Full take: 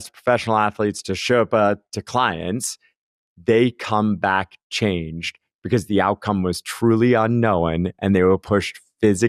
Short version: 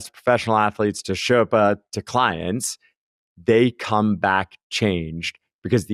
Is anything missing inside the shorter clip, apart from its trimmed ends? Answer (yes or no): no